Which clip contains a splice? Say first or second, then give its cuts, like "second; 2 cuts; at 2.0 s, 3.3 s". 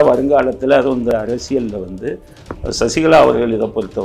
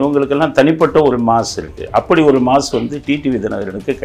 first; 1 cut; at 1.1 s